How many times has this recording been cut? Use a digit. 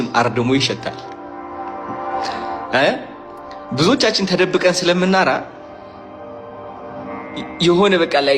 1